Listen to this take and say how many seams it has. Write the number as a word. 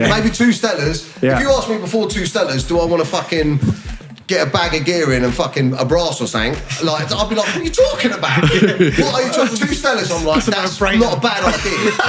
zero